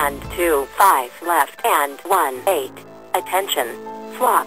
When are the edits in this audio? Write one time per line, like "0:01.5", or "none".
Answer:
0:02.7